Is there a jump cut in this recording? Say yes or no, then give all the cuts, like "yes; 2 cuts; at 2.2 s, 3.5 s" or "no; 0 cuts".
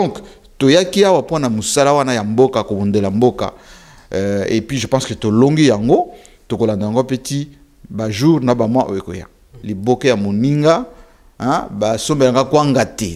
yes; 1 cut; at 9.4 s